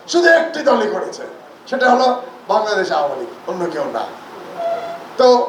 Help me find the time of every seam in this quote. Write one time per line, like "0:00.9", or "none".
none